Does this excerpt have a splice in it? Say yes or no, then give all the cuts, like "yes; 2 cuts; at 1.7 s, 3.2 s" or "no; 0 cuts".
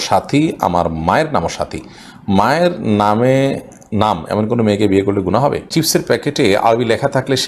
yes; 1 cut; at 5.7 s